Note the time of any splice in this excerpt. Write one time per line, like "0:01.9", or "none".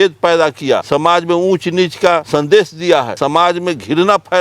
0:00.8
0:02.2
0:03.1